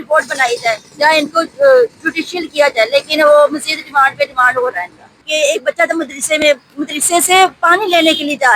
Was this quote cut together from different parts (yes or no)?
yes